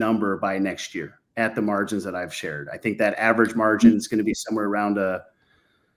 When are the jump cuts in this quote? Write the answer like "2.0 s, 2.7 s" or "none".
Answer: none